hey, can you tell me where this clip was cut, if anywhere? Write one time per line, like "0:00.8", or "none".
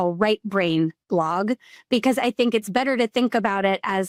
none